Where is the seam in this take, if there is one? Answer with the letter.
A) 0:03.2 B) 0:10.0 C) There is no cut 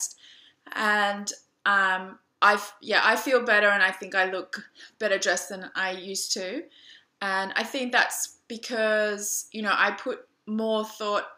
A